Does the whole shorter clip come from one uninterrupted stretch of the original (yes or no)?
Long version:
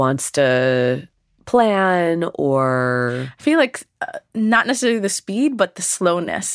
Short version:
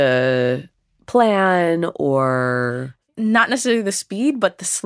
no